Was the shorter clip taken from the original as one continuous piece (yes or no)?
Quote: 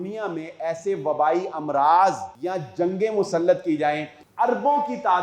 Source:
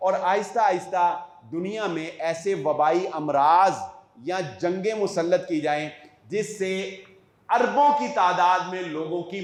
no